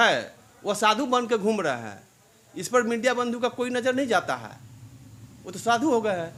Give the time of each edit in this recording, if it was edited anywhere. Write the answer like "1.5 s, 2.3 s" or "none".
none